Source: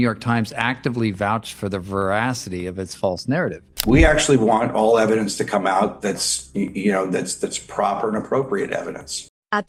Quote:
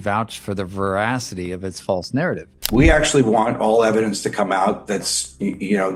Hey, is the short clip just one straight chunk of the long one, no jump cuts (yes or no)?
yes